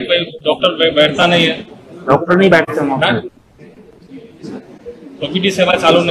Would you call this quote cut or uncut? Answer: uncut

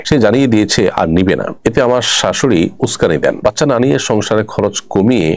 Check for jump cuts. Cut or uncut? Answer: uncut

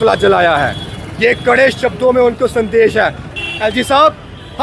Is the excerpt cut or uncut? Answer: cut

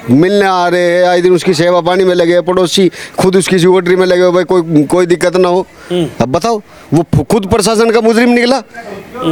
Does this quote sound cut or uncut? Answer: uncut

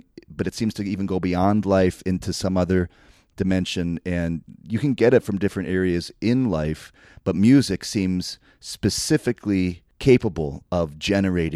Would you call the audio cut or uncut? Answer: cut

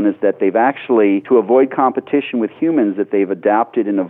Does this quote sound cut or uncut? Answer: cut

